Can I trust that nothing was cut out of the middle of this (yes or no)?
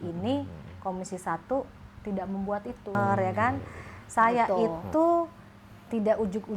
no